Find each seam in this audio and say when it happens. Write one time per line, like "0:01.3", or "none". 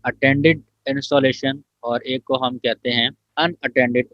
0:03.2